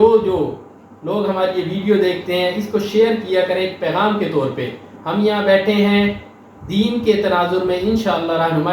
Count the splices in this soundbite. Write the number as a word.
zero